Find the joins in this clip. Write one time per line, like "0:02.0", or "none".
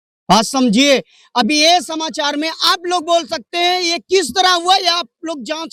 none